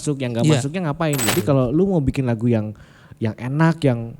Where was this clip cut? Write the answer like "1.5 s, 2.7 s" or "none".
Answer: 1.3 s